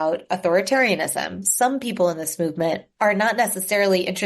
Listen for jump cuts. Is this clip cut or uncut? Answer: cut